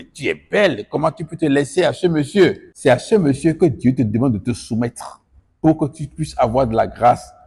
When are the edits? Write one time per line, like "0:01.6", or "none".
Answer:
0:02.7